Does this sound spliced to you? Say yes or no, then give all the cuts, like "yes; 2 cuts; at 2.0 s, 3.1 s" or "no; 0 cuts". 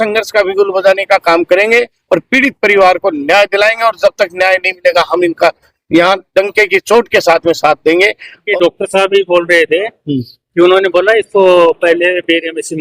yes; 1 cut; at 8.3 s